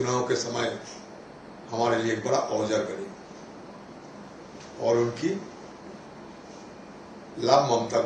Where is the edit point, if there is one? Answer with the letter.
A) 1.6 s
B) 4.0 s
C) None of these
C